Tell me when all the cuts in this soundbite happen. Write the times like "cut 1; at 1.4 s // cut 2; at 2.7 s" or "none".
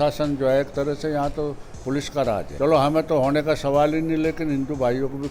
cut 1; at 2.5 s